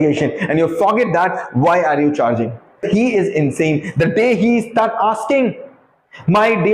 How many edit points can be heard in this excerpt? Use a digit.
1